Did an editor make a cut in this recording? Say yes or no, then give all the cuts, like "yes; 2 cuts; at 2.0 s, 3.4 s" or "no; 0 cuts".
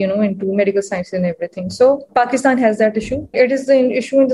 yes; 2 cuts; at 2.1 s, 3.3 s